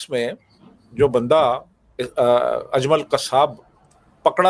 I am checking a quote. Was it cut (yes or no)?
no